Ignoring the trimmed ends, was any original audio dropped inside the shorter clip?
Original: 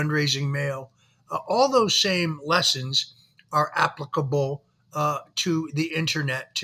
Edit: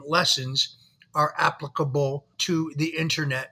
yes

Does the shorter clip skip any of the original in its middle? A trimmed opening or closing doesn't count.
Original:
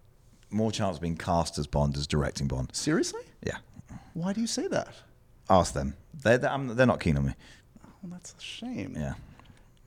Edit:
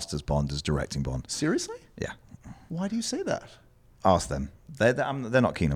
no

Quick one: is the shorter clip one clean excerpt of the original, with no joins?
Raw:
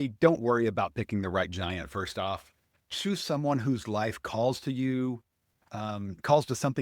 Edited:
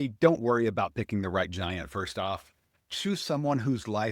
yes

